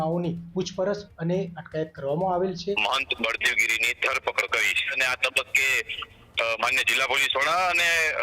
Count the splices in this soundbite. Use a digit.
2